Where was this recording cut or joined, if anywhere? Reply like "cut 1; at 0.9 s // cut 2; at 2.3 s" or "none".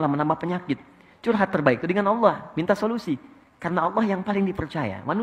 none